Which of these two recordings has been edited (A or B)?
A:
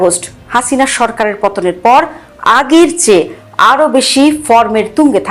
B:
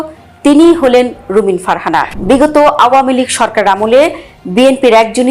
B